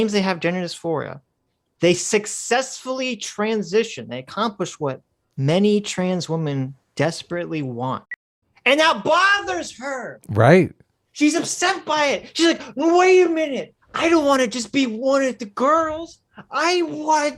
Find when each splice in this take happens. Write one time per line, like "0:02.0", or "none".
0:08.1